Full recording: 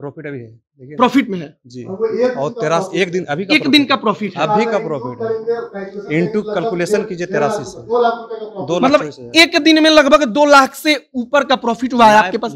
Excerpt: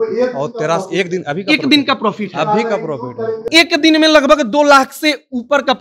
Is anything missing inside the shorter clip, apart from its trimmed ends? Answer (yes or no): yes